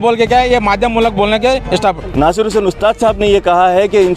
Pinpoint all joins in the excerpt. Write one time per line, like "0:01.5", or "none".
0:02.0